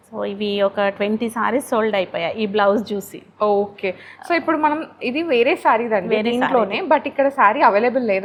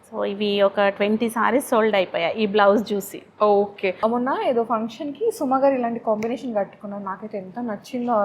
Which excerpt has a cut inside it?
second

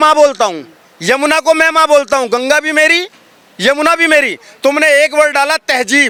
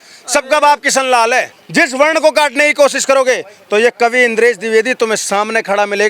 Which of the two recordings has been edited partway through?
second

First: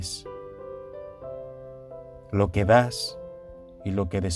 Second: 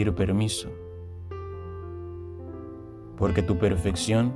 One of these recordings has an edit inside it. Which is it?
second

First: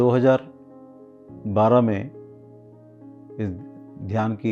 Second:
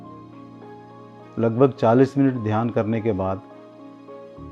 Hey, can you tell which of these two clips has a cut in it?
second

